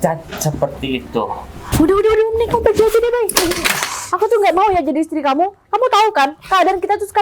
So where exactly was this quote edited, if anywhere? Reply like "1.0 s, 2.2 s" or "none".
1.5 s

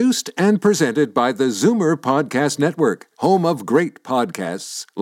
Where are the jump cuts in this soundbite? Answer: none

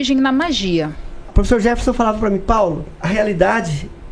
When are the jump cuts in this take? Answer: 1.2 s, 2.9 s

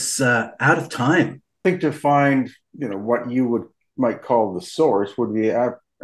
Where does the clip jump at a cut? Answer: 1.6 s, 2.6 s

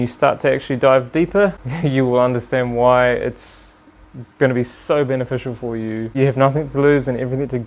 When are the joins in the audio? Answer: 1.7 s, 6.1 s

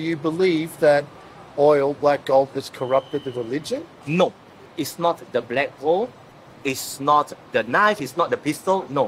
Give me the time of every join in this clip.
none

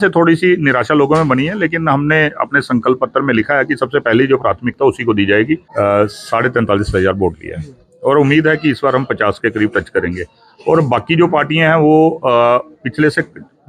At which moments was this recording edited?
5.7 s

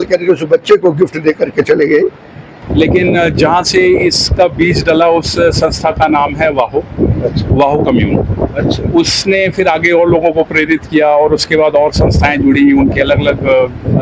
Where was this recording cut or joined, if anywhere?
2.6 s

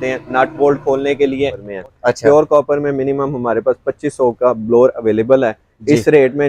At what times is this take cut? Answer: 1.7 s

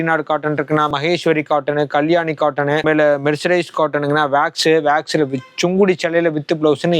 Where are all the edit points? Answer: 0.9 s, 2.8 s

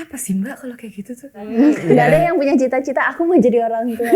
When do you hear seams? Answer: 1.8 s

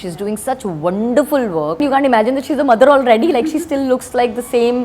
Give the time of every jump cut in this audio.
1.8 s

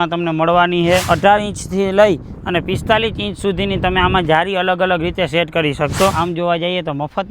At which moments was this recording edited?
1.0 s, 6.1 s

